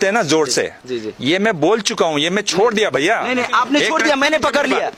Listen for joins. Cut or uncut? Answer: uncut